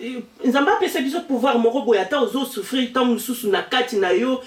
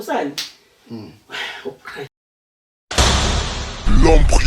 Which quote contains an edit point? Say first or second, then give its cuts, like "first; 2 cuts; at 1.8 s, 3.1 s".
second; 1 cut; at 2.1 s